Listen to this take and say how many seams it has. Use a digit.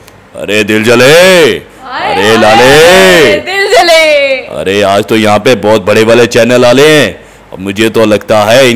0